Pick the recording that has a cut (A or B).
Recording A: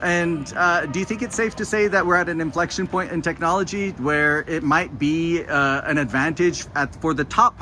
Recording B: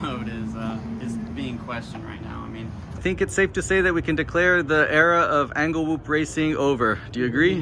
B